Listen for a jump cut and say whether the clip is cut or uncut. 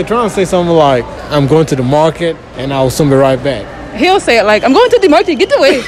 cut